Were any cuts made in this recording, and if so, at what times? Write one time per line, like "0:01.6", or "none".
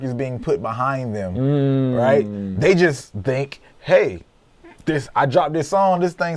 none